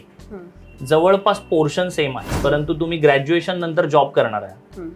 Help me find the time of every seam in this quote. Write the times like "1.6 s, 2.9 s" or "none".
2.2 s

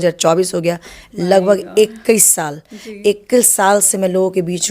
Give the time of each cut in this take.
none

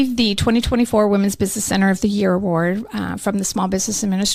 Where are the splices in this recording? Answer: none

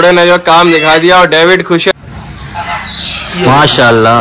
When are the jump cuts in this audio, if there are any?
1.9 s

